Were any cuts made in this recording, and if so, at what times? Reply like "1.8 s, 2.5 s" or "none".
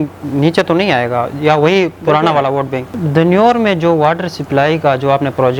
2.9 s